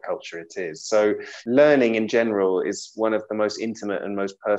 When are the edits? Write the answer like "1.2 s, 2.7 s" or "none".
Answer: 1.3 s